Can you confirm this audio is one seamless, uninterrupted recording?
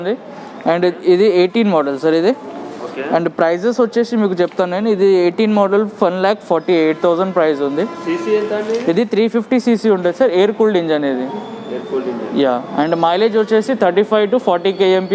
yes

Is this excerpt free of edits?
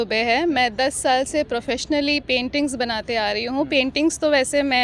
yes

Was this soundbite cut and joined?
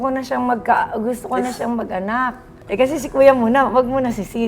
yes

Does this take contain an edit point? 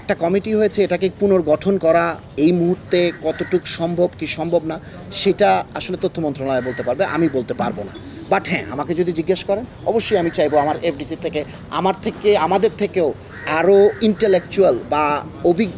no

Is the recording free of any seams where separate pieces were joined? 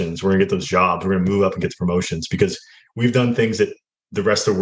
yes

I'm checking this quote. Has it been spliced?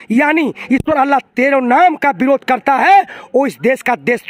no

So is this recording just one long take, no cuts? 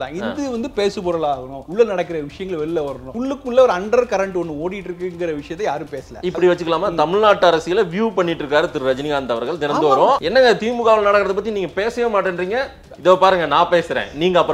no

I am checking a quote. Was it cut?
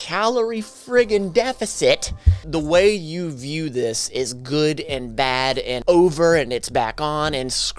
yes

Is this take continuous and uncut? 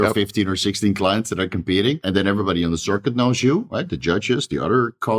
no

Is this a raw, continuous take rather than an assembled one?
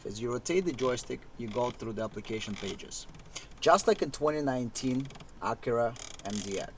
yes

